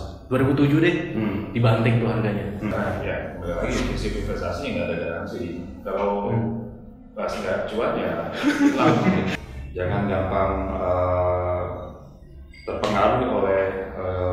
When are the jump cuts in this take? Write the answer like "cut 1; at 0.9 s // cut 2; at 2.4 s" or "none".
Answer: cut 1; at 2.7 s // cut 2; at 9.3 s